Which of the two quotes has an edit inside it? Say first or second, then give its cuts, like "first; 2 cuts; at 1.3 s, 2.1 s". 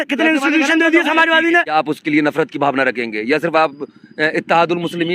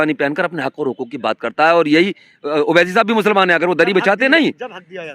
first; 1 cut; at 1.7 s